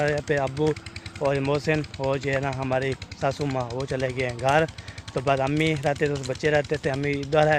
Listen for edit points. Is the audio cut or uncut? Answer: uncut